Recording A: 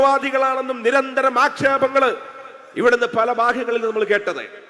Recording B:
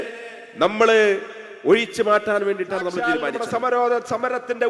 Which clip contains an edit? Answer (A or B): B